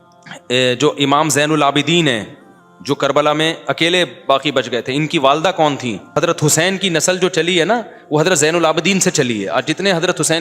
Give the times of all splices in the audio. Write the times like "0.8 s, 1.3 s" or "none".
6.1 s